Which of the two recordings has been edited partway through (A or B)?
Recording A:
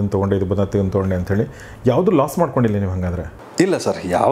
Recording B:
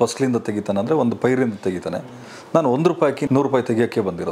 B